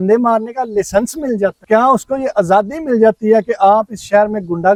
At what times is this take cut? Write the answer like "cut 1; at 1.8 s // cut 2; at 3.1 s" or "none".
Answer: none